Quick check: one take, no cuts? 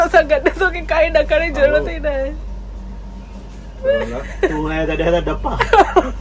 yes; 0 cuts

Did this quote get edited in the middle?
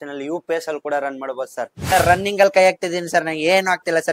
yes; 1 cut; at 1.8 s

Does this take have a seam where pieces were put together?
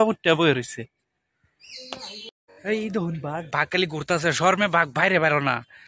yes; 1 cut; at 2.3 s

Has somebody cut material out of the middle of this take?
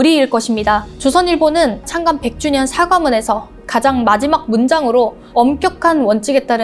yes; 3 cuts; at 0.9 s, 1.9 s, 5.2 s

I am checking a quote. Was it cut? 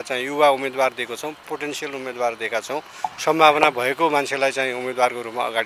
no; 0 cuts

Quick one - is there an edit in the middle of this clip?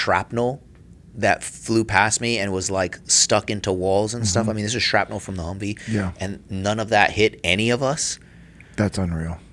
no; 0 cuts

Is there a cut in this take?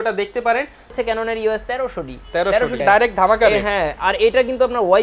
yes; 2 cuts; at 0.9 s, 2.8 s

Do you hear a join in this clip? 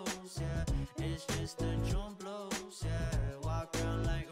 no; 0 cuts

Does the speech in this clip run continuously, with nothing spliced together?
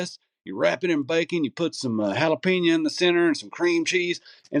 yes; 0 cuts

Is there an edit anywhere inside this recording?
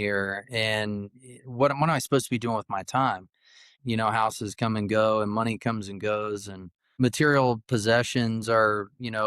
yes; 2 cuts; at 3.8 s, 6.9 s

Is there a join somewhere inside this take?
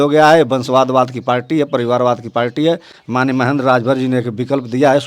no; 0 cuts

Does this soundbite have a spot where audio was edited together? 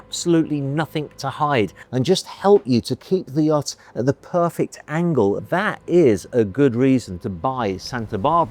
yes; 2 cuts; at 1.8 s, 5.4 s

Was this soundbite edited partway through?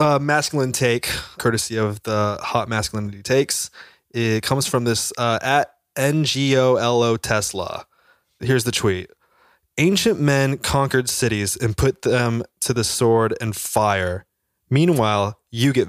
yes; 1 cut; at 1.4 s

